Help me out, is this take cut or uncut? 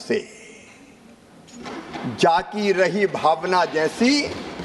uncut